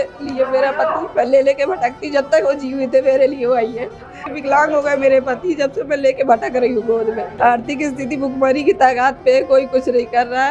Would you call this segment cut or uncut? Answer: cut